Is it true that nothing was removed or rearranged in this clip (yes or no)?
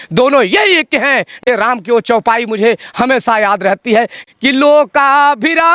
no